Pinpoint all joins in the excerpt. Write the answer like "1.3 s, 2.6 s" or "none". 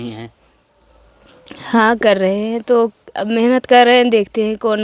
none